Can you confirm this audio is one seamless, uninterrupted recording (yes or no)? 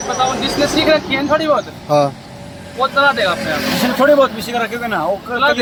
yes